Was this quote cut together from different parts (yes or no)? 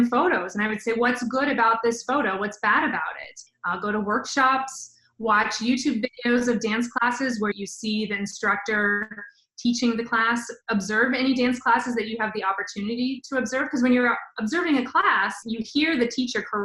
no